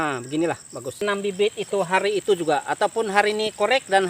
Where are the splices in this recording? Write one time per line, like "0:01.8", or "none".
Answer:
0:01.0